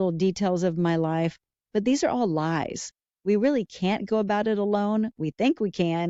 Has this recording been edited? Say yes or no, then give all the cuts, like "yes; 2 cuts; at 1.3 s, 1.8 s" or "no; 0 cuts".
no; 0 cuts